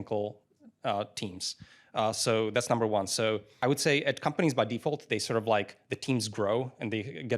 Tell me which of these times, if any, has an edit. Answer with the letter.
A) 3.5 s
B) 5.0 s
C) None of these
A